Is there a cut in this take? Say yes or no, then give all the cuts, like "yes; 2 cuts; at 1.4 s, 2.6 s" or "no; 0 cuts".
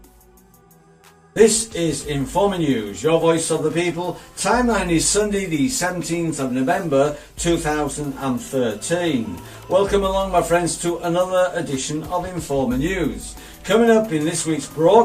yes; 1 cut; at 9.3 s